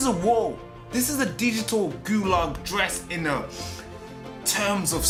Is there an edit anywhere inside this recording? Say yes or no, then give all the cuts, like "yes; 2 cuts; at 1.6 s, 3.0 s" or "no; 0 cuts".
no; 0 cuts